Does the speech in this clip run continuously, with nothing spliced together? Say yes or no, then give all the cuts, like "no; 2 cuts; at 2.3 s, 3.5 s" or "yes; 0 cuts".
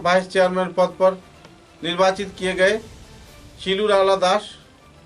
yes; 0 cuts